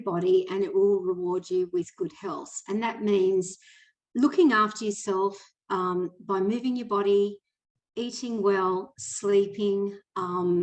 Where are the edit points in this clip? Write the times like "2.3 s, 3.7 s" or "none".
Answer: none

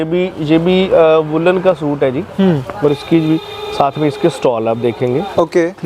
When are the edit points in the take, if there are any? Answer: none

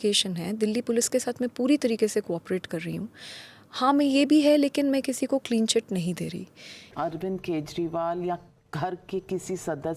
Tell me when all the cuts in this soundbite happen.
6.9 s

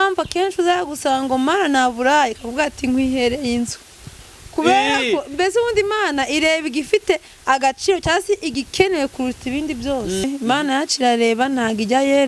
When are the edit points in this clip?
10.2 s

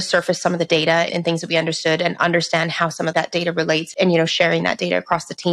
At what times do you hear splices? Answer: 1.1 s, 3.4 s

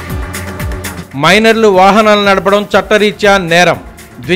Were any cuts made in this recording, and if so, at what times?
0.9 s

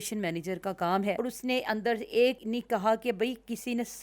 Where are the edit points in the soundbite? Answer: 1.2 s, 2.4 s

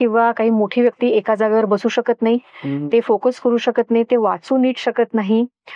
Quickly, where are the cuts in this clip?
none

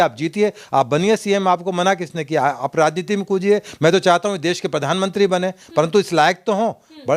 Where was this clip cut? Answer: none

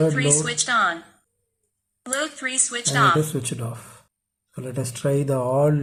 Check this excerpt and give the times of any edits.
none

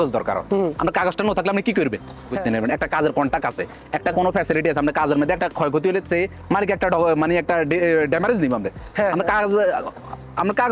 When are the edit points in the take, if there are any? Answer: 2.4 s

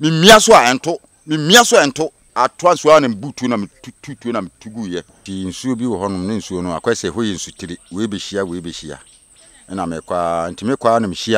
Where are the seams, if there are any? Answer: 2.2 s, 5.2 s

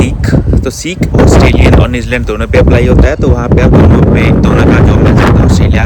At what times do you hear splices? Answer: none

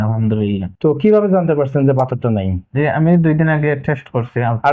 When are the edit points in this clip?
none

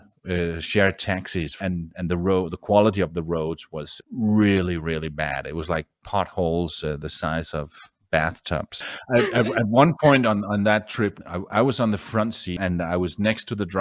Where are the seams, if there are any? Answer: 1.5 s, 8.8 s, 12.5 s

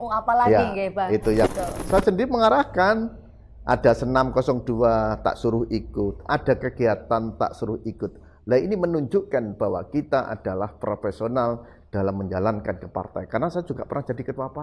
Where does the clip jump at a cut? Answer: 1.5 s

